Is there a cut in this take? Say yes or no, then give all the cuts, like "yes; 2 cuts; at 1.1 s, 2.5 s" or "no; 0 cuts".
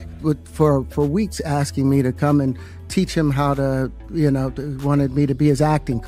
no; 0 cuts